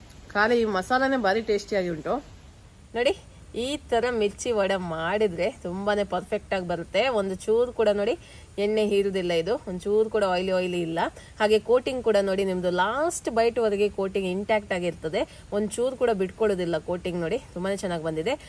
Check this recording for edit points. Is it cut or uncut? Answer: cut